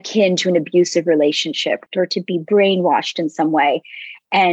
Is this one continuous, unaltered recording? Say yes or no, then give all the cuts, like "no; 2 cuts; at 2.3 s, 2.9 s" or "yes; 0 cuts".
no; 1 cut; at 1.8 s